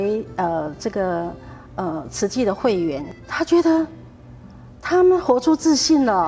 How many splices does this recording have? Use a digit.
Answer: 1